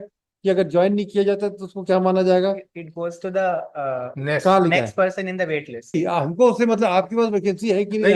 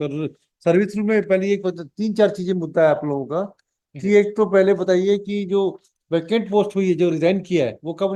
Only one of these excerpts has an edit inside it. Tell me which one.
first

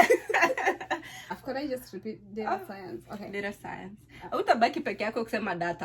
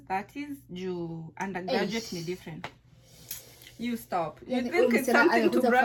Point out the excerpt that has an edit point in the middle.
first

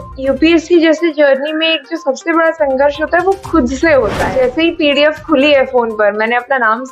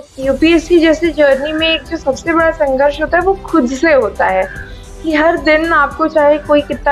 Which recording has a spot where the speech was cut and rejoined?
first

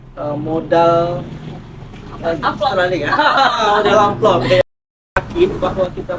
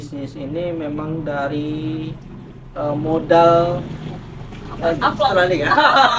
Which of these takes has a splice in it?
first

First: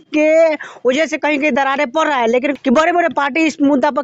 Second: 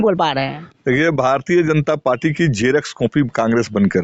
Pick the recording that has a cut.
first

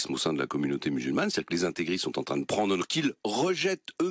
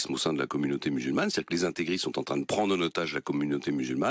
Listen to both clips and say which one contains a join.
second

